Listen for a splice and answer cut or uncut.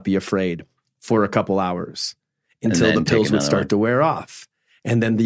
uncut